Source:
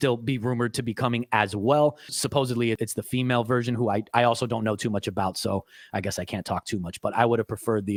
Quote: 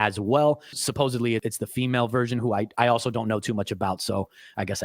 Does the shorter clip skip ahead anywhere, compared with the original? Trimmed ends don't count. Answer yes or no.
no